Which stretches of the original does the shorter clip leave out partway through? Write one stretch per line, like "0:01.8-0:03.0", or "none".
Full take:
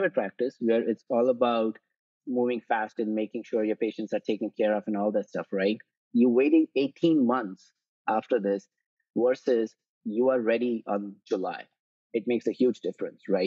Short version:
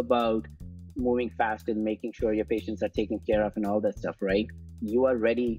0:05.9-0:09.9